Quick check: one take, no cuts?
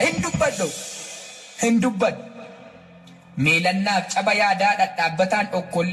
yes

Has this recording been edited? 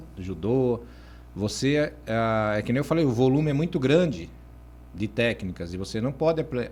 no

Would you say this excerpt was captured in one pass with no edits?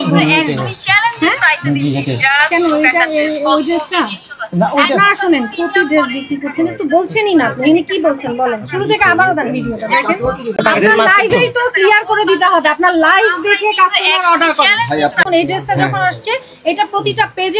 no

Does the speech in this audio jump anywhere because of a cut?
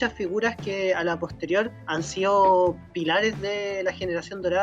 yes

